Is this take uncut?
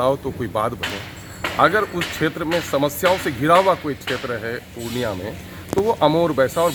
yes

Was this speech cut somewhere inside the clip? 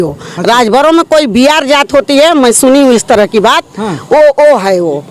no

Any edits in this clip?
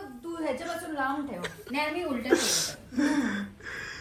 no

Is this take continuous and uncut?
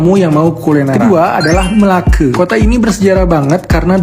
yes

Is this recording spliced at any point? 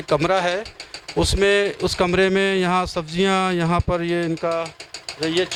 no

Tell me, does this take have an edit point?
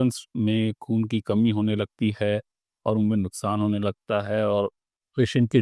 no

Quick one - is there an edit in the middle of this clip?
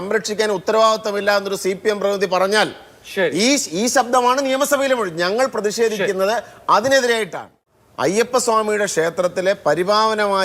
yes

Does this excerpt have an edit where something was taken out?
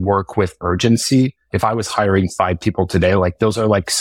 yes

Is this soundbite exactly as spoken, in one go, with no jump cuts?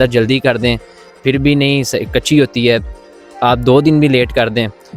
yes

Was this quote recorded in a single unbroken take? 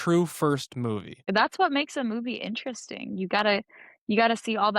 no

